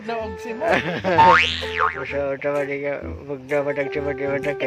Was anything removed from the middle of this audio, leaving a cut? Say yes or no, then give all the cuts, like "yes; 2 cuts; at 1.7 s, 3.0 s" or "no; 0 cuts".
no; 0 cuts